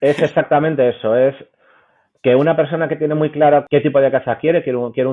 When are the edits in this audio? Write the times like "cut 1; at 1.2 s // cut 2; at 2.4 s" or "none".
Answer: cut 1; at 3.7 s

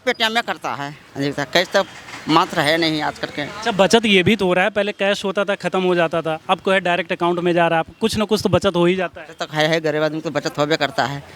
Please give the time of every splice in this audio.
none

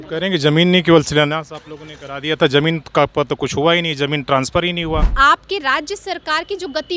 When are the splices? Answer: cut 1; at 5.1 s

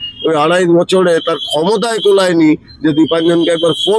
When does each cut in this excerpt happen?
none

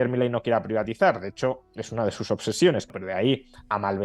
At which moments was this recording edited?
cut 1; at 2.9 s

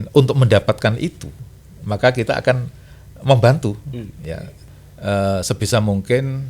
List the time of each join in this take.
cut 1; at 4.5 s

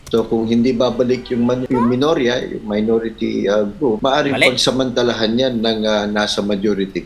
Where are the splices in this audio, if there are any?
cut 1; at 1.6 s // cut 2; at 4.0 s

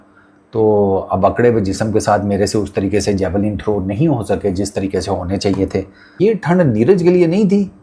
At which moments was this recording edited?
cut 1; at 6.1 s

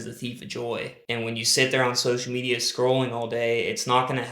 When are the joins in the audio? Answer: cut 1; at 1.0 s

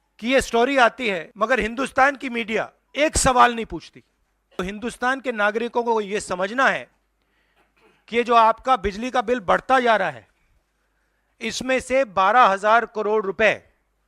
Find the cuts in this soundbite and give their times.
cut 1; at 1.3 s // cut 2; at 2.8 s // cut 3; at 4.6 s

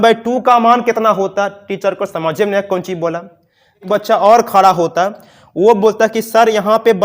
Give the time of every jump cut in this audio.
cut 1; at 3.8 s

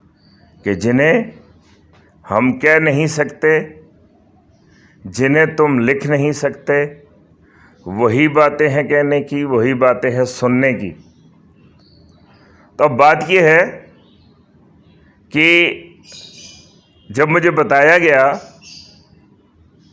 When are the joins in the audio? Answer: none

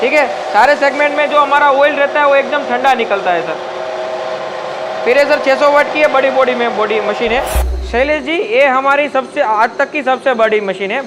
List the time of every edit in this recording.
cut 1; at 7.6 s

